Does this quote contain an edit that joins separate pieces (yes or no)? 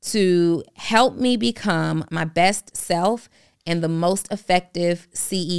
yes